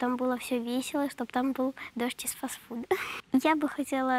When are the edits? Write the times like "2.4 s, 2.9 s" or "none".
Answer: 3.1 s